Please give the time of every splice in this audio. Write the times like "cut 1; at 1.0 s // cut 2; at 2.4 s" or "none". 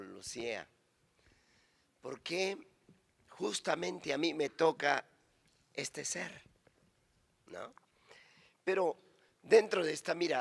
none